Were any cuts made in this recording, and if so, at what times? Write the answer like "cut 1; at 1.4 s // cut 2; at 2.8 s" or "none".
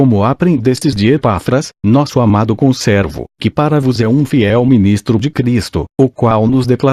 none

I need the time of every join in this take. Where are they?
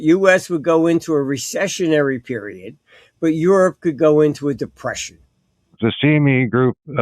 cut 1; at 5.7 s

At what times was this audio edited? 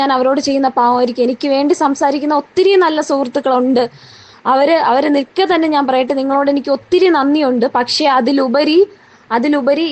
cut 1; at 4.8 s

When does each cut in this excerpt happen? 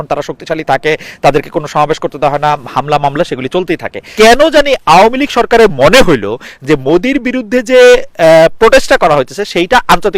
cut 1; at 4.0 s

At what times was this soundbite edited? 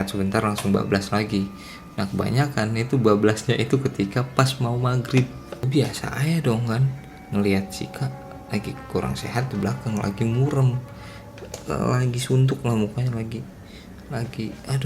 cut 1; at 5.7 s

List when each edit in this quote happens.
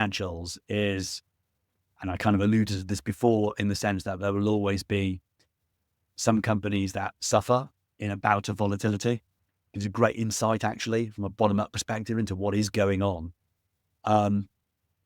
none

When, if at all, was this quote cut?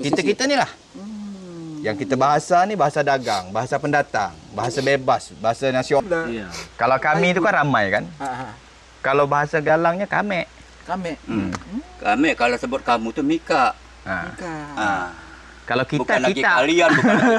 cut 1; at 6.0 s

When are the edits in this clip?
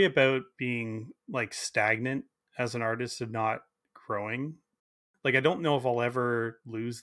cut 1; at 5.0 s

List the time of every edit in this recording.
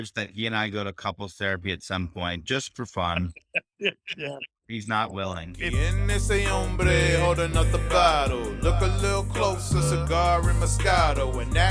cut 1; at 5.6 s

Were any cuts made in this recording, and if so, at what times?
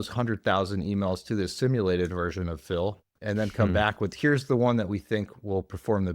cut 1; at 3.2 s

